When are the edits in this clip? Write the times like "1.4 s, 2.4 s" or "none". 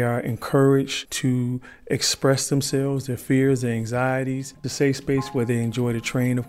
1.0 s, 4.7 s